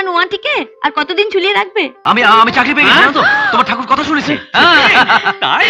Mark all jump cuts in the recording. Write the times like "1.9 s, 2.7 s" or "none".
2.0 s